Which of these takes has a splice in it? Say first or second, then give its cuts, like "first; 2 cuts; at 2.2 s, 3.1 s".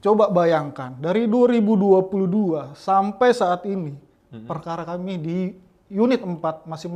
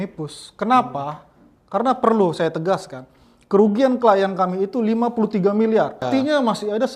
second; 1 cut; at 6.0 s